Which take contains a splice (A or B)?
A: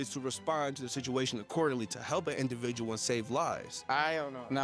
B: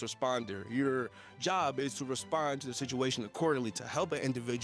A